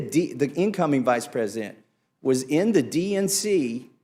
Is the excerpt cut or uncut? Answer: uncut